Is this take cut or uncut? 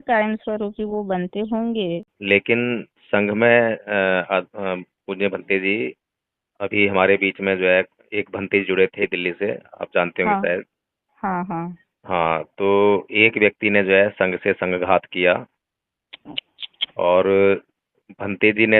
cut